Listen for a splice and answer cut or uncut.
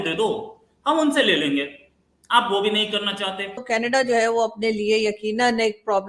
cut